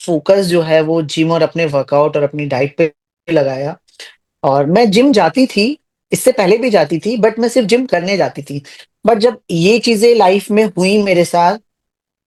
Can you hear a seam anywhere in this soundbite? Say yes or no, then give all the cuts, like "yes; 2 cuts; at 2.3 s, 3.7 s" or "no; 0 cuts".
no; 0 cuts